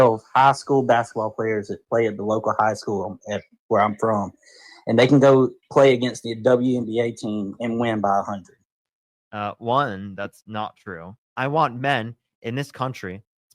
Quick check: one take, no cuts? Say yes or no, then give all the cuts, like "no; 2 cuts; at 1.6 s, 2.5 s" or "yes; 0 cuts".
no; 1 cut; at 11.2 s